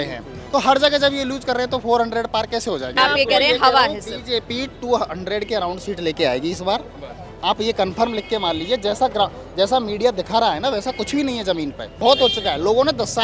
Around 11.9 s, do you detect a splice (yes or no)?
yes